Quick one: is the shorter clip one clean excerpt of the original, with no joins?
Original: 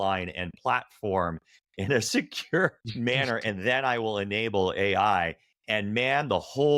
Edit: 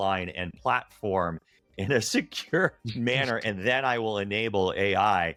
yes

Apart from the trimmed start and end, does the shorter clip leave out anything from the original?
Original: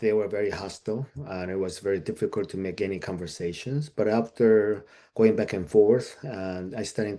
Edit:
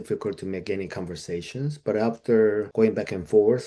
yes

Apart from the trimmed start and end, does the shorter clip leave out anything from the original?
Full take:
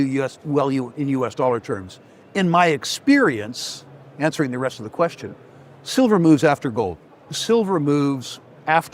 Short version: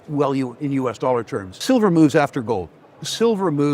yes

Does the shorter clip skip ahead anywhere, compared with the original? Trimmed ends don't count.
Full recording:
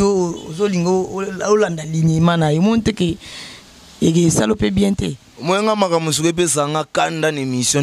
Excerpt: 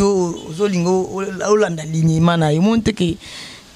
no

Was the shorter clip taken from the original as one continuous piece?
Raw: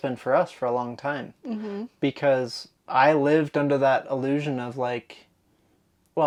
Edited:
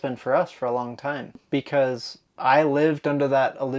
no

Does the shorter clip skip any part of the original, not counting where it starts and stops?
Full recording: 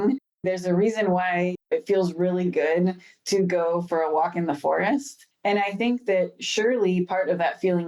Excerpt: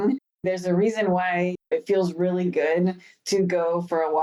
no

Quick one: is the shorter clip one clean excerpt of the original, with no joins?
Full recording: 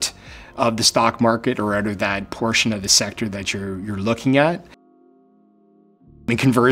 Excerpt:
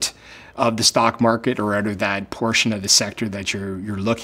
yes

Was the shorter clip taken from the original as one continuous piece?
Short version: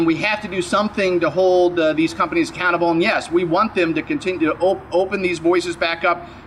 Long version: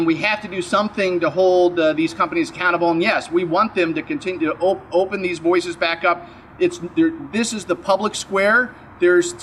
yes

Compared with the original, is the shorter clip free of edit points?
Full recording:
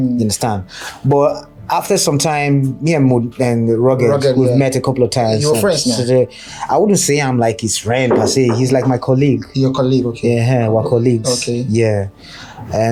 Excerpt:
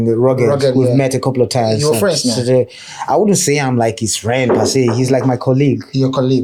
yes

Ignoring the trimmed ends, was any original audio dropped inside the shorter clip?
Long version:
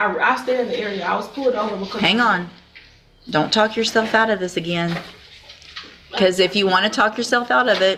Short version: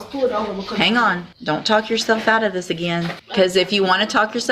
yes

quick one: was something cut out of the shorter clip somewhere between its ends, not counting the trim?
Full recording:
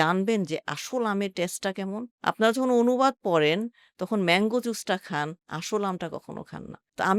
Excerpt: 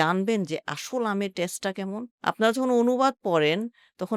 no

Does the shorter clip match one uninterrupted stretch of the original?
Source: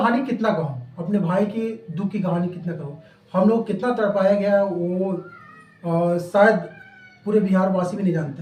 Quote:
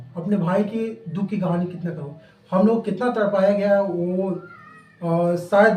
yes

